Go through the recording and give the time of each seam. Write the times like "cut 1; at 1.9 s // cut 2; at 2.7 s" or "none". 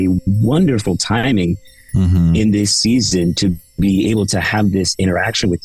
none